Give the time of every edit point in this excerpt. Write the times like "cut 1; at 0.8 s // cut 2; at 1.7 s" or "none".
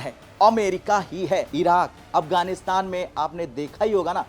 cut 1; at 1.5 s